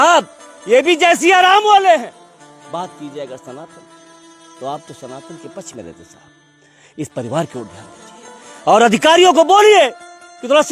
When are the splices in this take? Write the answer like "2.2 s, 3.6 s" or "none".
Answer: none